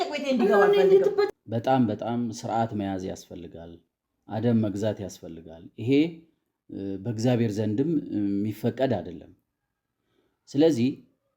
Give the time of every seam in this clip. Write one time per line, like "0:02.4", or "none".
0:01.3